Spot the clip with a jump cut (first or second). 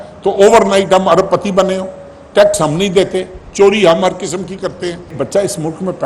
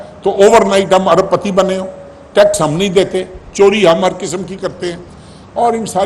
first